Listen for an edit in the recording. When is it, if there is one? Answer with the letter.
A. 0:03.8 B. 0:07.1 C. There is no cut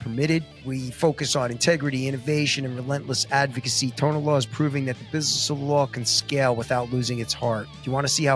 C